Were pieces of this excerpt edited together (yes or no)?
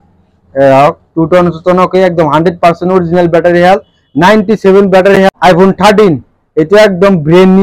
yes